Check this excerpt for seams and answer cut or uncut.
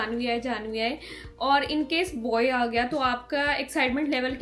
uncut